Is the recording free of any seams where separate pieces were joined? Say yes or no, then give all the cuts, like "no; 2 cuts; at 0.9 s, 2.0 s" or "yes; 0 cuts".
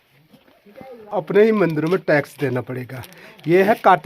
no; 1 cut; at 1.1 s